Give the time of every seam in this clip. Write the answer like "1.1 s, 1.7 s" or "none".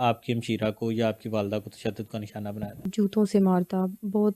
2.9 s